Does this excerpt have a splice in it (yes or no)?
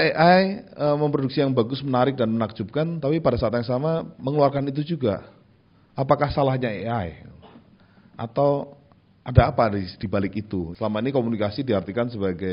yes